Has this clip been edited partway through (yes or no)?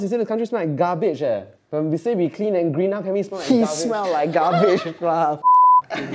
yes